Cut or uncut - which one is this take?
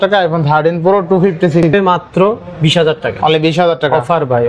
cut